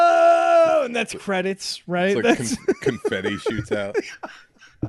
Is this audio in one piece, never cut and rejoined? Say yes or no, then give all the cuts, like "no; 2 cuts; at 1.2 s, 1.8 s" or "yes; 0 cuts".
yes; 0 cuts